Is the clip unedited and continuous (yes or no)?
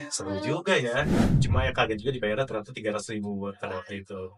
no